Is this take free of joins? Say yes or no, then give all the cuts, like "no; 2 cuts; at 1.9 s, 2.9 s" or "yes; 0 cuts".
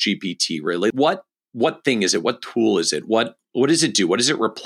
no; 1 cut; at 0.9 s